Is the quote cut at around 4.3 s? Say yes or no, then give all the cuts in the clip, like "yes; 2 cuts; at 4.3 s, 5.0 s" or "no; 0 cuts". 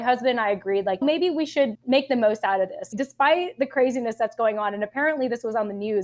no; 1 cut; at 2.9 s